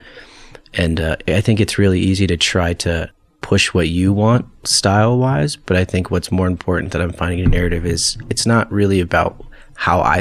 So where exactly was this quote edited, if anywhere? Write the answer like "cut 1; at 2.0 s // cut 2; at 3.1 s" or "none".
none

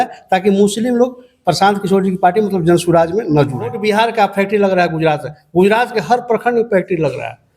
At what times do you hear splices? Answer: cut 1; at 3.8 s

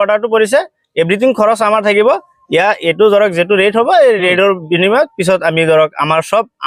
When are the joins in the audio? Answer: none

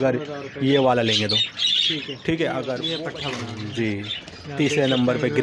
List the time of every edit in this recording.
cut 1; at 2.8 s

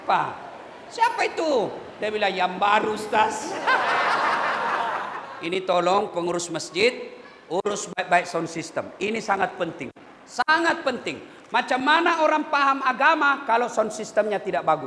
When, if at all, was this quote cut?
cut 1; at 5.2 s

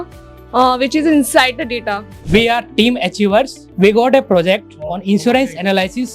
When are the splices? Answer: cut 1; at 2.1 s // cut 2; at 3.6 s

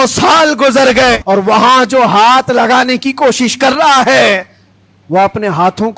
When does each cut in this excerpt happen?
cut 1; at 1.2 s

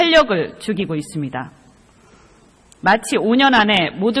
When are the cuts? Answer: none

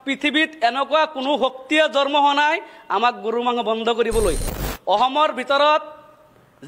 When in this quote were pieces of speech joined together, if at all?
cut 1; at 4.5 s

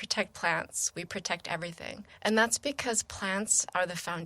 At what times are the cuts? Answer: cut 1; at 2.0 s

